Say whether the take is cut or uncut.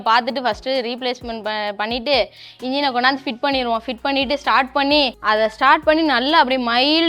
cut